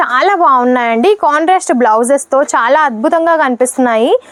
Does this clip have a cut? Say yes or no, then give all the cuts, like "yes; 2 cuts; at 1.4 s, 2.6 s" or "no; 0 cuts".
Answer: no; 0 cuts